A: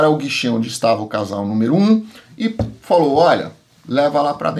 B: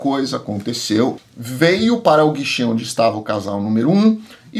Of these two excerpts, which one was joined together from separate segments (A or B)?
B